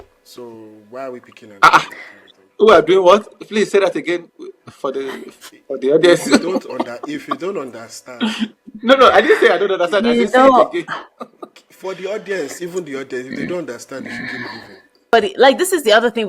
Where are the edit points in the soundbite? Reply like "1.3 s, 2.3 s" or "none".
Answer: 15.1 s